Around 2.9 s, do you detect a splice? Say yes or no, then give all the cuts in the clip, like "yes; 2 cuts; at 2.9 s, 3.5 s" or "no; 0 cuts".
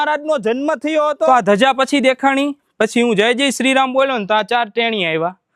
no; 1 cut; at 1.3 s